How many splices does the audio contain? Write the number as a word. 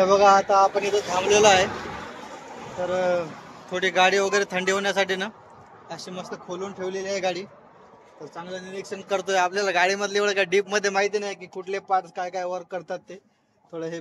zero